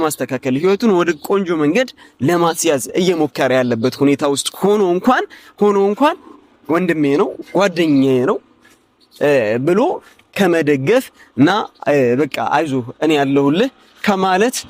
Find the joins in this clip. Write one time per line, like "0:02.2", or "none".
none